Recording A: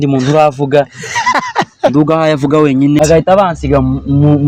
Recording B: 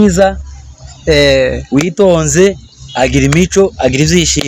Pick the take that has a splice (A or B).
A